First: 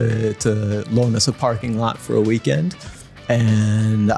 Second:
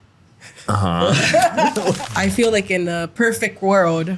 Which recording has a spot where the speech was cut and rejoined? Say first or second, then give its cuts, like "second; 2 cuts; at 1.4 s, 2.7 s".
second; 1 cut; at 2.0 s